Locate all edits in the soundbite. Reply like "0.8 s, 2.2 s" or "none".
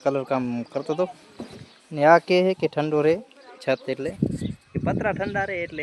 none